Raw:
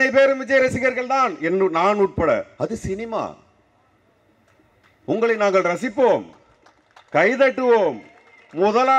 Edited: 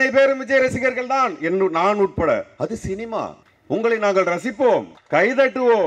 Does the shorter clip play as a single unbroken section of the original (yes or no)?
no